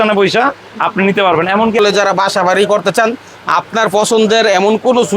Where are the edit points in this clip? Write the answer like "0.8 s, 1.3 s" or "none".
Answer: 1.8 s